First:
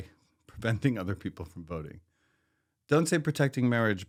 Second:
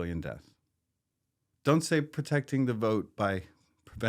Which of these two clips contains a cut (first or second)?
second